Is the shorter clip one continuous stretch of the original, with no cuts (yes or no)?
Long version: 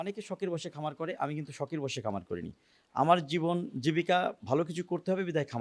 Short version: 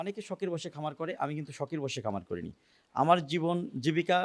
yes